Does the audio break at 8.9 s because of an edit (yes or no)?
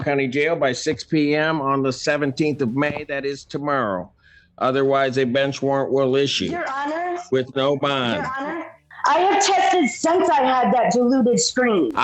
yes